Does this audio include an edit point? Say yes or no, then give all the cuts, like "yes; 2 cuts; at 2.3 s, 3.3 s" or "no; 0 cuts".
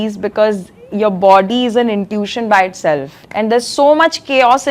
yes; 1 cut; at 3.2 s